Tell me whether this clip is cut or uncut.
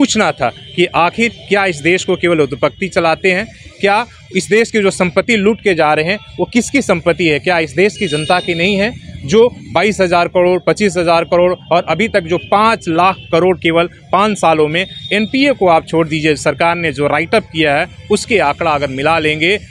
uncut